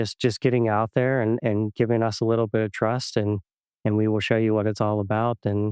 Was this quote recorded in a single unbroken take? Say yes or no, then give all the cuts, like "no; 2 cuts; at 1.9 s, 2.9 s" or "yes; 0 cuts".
yes; 0 cuts